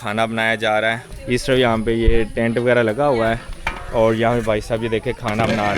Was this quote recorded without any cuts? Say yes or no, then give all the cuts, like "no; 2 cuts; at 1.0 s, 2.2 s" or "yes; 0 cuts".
yes; 0 cuts